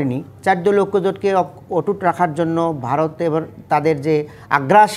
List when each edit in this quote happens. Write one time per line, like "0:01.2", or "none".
none